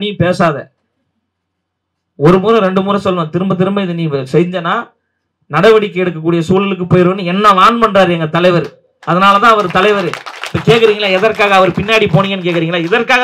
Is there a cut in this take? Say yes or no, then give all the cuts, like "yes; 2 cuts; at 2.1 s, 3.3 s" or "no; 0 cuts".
no; 0 cuts